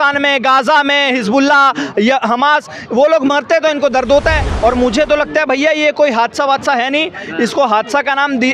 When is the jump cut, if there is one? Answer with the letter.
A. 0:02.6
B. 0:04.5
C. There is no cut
B